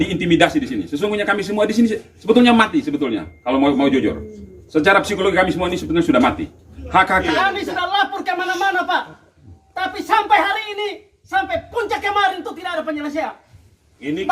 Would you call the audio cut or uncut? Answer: cut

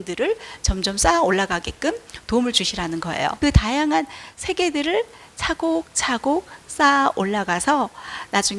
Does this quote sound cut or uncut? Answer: cut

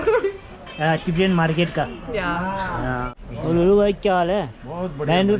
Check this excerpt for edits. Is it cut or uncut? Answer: cut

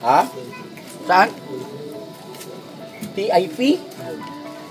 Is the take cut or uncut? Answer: uncut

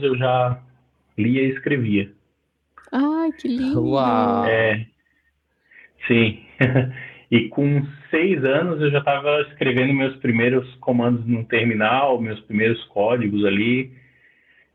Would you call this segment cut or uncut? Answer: uncut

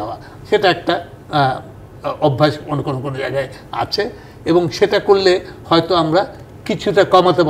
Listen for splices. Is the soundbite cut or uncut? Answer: uncut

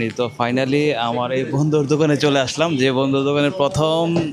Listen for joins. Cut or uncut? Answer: uncut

